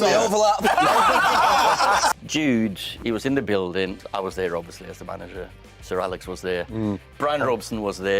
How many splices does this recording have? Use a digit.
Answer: 3